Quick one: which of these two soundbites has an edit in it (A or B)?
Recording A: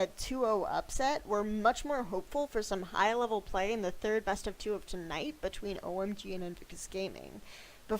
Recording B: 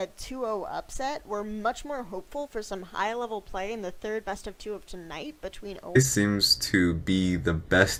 A